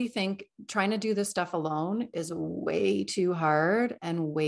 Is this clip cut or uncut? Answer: uncut